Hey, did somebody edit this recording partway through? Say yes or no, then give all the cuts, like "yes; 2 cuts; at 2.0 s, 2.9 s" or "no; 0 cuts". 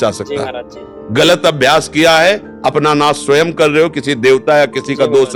no; 0 cuts